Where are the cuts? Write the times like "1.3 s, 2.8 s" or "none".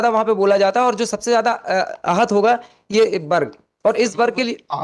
none

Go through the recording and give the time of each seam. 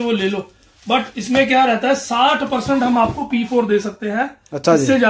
none

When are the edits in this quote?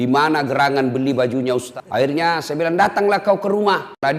1.7 s

